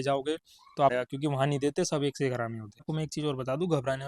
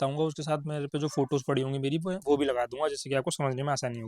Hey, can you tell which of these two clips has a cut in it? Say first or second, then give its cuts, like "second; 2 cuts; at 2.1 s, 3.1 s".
first; 2 cuts; at 0.9 s, 2.9 s